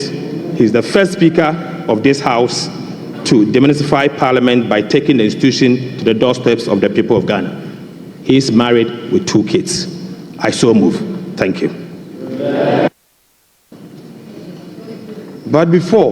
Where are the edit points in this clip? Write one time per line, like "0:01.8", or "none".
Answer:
0:13.7